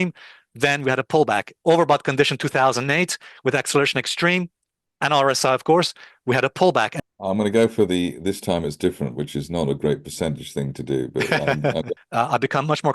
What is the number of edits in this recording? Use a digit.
2